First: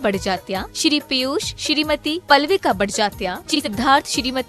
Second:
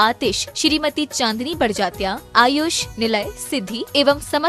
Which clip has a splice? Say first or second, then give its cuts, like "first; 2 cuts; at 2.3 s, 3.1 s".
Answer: first; 1 cut; at 3.6 s